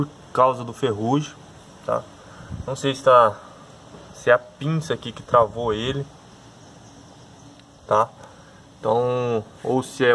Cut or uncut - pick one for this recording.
uncut